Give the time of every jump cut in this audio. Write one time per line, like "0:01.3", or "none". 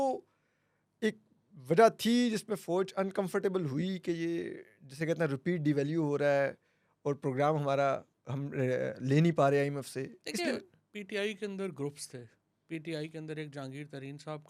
none

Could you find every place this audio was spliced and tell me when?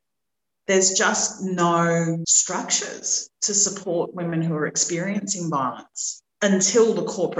0:02.4

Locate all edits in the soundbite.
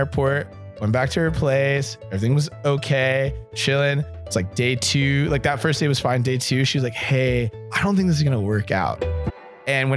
0:09.0

